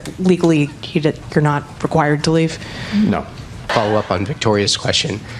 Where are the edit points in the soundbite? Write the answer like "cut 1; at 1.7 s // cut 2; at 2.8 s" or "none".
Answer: none